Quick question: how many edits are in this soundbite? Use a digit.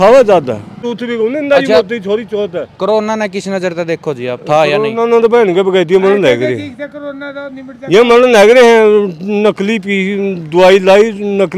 1